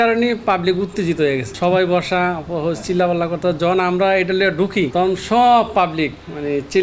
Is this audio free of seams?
no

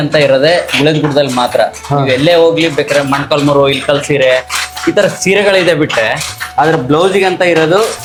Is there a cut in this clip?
no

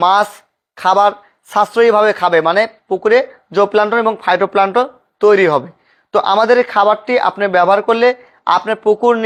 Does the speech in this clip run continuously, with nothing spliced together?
yes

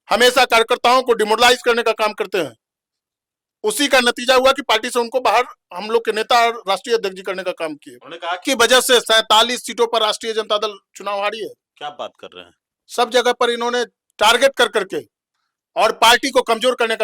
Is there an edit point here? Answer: yes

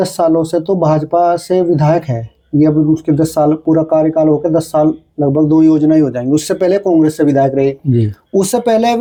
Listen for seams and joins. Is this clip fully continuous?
yes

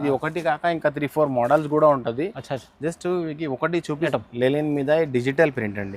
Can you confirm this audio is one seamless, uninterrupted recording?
no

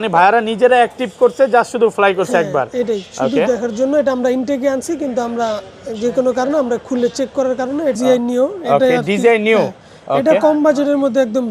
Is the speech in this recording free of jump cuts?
no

